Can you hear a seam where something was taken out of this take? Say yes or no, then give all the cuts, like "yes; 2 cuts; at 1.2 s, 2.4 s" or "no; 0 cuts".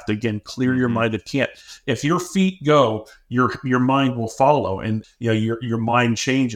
yes; 1 cut; at 5.0 s